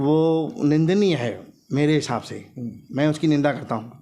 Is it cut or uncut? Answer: uncut